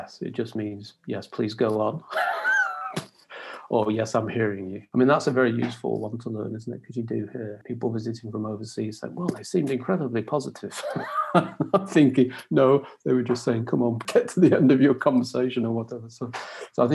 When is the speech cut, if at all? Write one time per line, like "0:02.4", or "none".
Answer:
0:04.7
0:07.6
0:14.0